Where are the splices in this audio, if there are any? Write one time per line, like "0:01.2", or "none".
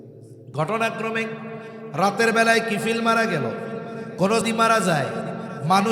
0:04.5